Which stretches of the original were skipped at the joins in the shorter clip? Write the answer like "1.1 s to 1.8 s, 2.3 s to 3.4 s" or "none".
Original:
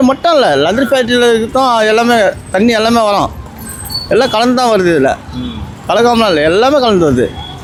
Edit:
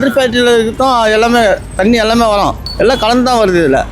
3.4 s to 3.9 s

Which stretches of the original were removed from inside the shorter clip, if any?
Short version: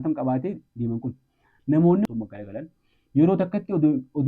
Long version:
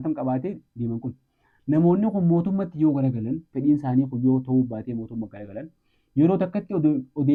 2.1 s to 5.1 s

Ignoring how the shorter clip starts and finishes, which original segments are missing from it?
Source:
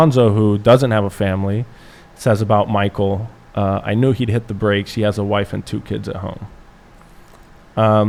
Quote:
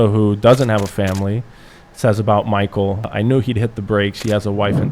3.3 s to 3.8 s

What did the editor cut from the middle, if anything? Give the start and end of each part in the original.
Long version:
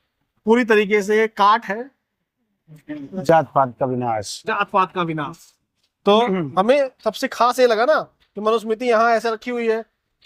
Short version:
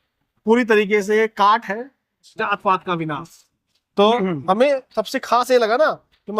2.2 s to 4.3 s

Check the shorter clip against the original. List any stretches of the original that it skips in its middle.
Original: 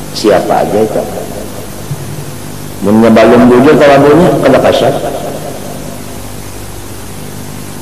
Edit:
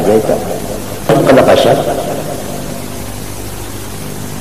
1.8 s to 4.3 s

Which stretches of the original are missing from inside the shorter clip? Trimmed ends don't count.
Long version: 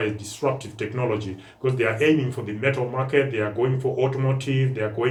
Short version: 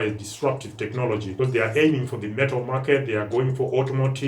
1.3 s to 1.5 s

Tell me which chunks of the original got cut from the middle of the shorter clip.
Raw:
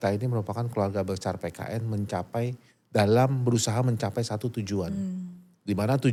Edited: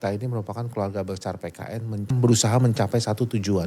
2.1 s to 3.3 s

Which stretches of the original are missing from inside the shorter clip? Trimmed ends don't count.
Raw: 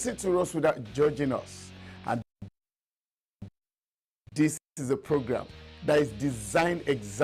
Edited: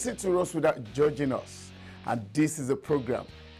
2.5 s to 4.7 s

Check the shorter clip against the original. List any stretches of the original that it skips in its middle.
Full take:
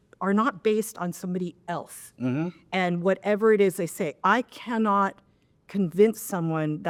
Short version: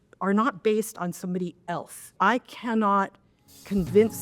2.1 s to 4.1 s

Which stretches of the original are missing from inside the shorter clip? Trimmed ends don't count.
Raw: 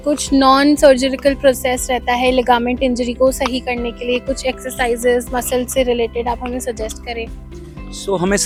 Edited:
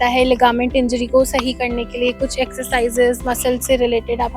none

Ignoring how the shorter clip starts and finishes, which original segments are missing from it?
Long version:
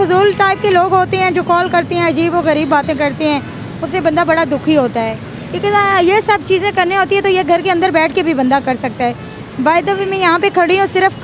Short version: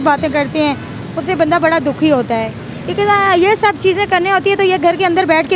none

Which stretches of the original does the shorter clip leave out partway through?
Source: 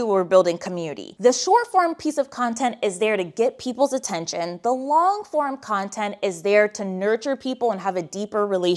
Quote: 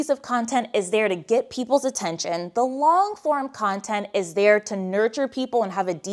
none

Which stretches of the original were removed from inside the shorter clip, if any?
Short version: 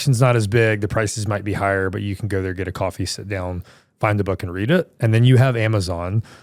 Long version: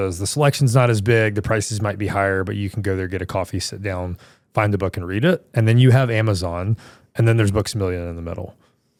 none

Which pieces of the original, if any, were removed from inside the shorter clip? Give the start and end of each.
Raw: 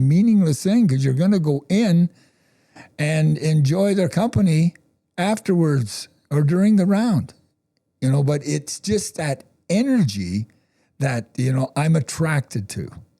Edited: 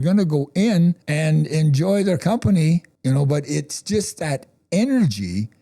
2.2 s to 3.0 s, 4.8 s to 7.9 s

